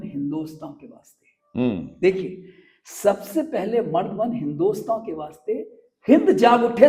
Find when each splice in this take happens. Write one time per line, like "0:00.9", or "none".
none